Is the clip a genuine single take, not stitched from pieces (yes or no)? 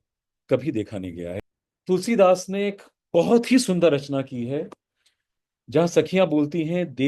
no